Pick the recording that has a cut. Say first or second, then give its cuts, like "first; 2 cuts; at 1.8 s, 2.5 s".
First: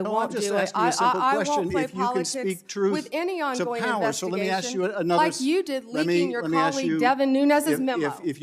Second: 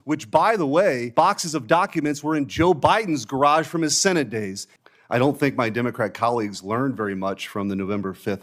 second; 2 cuts; at 1.0 s, 4.6 s